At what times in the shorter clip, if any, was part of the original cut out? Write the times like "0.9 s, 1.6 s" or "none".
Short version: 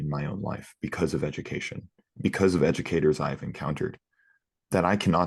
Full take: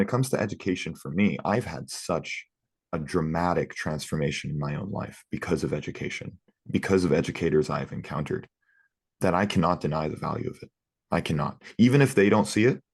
none

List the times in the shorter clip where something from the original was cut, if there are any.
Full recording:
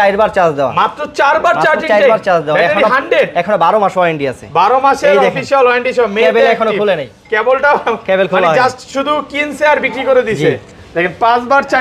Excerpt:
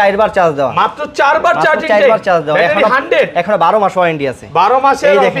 none

